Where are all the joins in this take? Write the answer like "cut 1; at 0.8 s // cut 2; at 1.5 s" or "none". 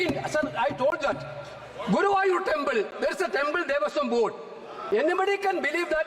none

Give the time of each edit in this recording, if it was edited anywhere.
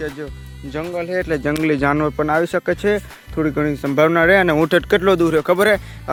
none

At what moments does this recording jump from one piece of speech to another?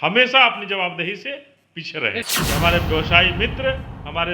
cut 1; at 2.2 s

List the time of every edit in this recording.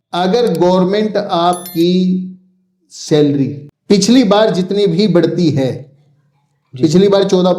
cut 1; at 3.7 s

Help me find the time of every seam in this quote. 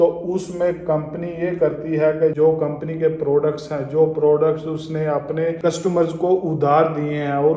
cut 1; at 2.3 s // cut 2; at 5.6 s

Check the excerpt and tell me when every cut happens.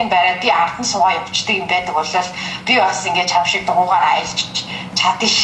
none

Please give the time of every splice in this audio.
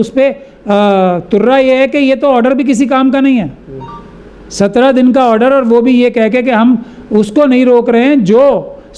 none

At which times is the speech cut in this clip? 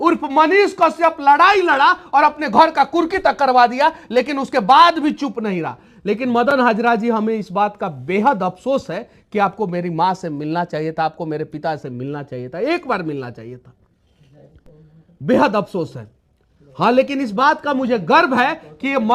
none

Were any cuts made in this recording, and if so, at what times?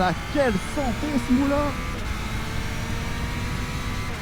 none

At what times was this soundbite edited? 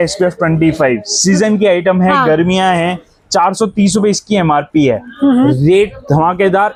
none

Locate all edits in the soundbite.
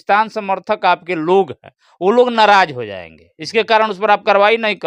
none

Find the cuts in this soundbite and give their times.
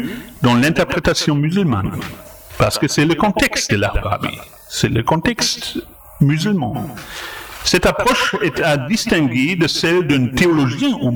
none

